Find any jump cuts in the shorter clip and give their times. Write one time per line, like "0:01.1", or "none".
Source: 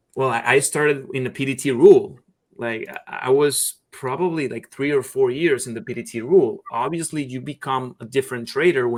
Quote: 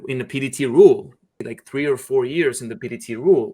0:01.5

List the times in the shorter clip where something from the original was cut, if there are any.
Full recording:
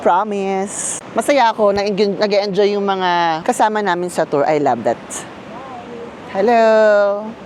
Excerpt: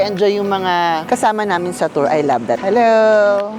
0:02.6

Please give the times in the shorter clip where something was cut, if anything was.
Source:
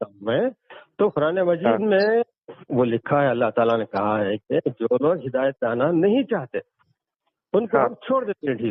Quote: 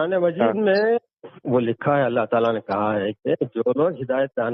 none

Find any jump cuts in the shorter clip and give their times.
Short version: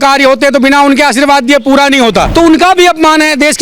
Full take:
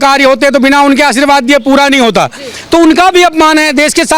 0:02.3

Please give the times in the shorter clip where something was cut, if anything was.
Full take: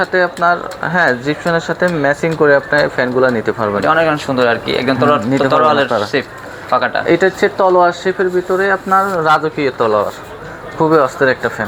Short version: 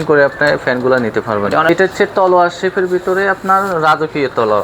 0:01.7

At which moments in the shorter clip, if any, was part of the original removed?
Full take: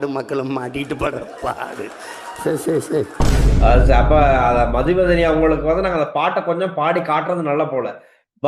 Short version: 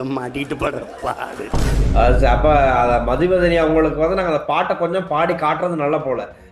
0:01.5

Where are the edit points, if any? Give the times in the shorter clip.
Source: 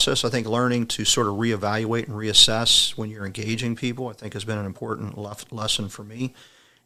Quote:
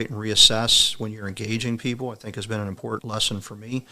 0:03.0

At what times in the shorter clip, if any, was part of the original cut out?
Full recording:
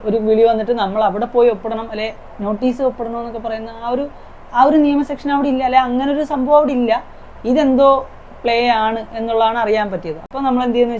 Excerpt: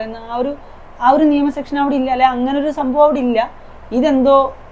none

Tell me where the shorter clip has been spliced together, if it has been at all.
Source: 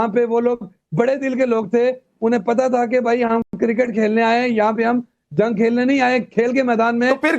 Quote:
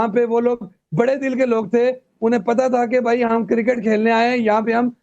0:03.4

